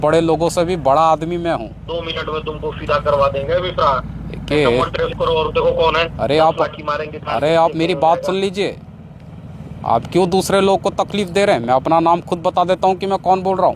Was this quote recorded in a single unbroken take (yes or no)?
no